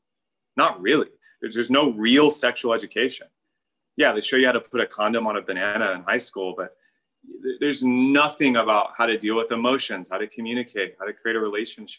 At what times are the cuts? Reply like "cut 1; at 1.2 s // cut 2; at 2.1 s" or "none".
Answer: none